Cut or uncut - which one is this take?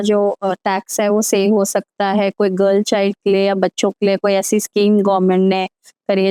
uncut